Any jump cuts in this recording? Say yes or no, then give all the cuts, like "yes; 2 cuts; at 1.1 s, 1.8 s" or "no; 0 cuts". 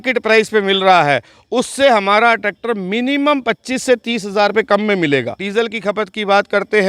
yes; 1 cut; at 5.4 s